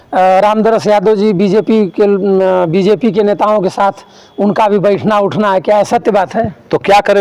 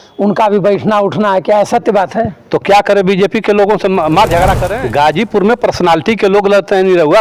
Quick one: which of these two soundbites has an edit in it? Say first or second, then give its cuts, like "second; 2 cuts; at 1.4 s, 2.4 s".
second; 1 cut; at 4.7 s